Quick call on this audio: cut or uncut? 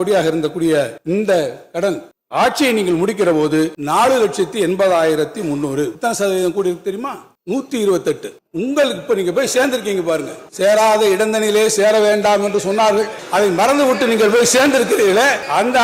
cut